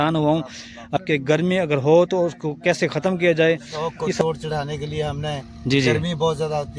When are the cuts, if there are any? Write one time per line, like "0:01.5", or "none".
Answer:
0:01.0
0:04.2